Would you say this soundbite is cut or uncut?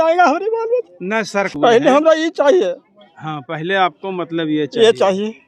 uncut